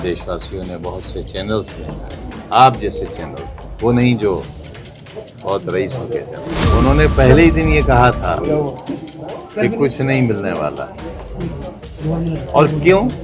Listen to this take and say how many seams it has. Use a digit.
1